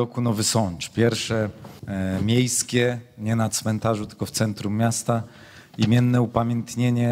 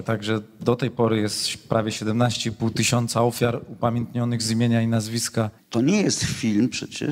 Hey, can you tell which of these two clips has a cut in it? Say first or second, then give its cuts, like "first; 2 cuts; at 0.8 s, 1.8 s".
second; 1 cut; at 5.6 s